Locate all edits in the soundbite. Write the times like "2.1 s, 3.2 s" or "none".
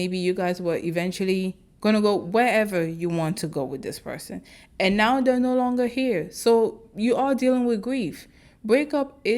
none

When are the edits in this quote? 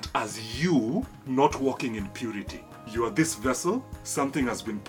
1.2 s, 2.9 s, 4.0 s

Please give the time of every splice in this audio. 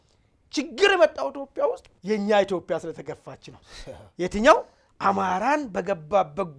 1.9 s

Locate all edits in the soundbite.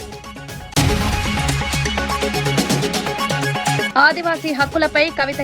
0.7 s, 2.1 s, 3.4 s

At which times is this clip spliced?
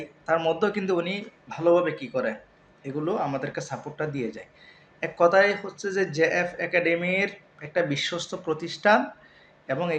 none

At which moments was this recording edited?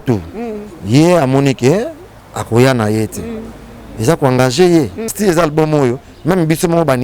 5.1 s

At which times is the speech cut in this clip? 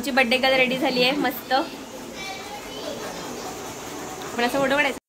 none

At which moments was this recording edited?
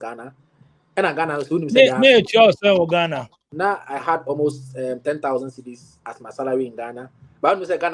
3.5 s

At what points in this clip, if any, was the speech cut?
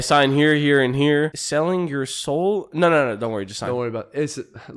1.4 s

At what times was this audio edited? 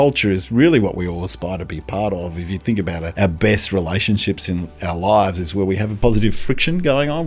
3.1 s, 5.9 s

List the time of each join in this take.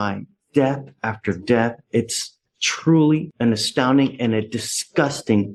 none

